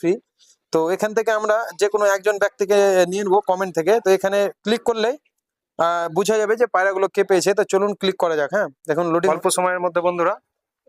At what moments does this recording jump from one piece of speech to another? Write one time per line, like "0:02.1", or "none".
0:09.3